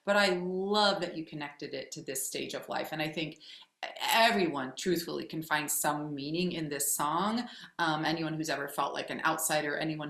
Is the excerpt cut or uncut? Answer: uncut